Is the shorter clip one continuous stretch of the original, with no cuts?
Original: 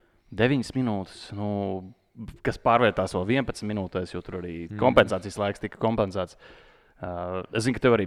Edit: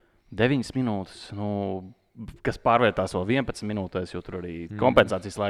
yes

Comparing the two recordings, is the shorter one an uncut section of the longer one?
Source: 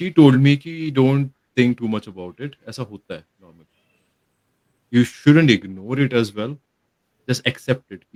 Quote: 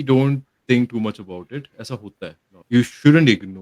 no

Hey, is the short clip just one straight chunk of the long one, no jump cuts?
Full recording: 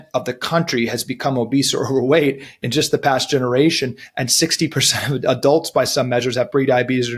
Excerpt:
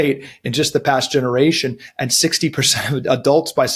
yes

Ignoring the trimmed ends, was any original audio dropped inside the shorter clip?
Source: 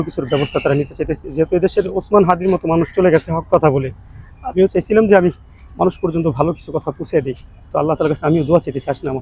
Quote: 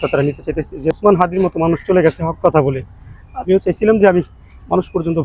yes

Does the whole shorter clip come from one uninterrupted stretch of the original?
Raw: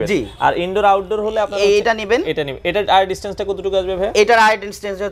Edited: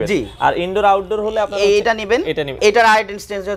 no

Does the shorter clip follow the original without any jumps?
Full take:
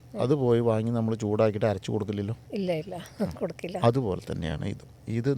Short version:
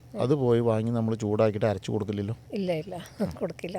yes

